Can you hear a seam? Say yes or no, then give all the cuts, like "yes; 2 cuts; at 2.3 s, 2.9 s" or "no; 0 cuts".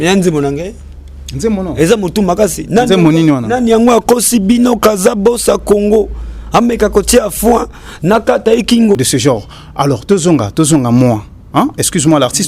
yes; 1 cut; at 9.0 s